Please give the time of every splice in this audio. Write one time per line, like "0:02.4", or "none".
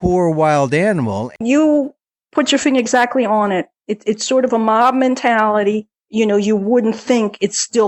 0:01.4
0:06.0